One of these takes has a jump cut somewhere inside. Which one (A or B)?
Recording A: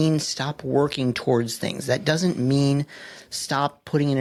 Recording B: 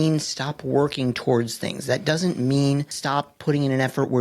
B